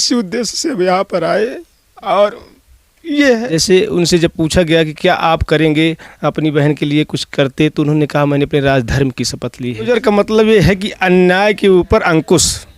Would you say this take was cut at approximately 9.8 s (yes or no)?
yes